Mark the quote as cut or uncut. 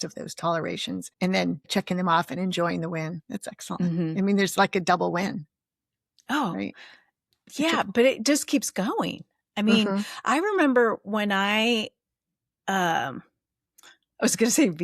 cut